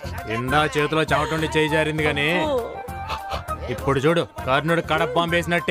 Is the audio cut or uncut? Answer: uncut